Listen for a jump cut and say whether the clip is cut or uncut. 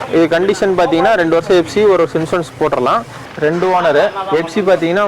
cut